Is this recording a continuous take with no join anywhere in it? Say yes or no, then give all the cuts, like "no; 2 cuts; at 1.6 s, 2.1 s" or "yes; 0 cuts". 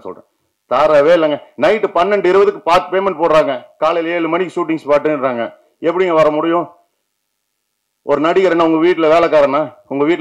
yes; 0 cuts